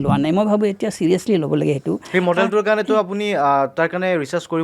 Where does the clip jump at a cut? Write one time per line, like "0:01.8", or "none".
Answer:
none